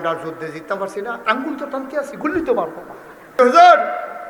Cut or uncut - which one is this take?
cut